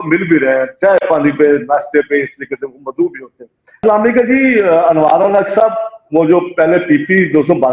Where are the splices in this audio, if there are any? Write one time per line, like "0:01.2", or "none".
0:03.8